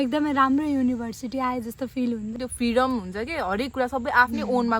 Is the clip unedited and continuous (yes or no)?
no